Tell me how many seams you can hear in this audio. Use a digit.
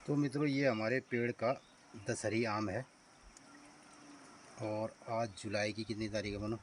0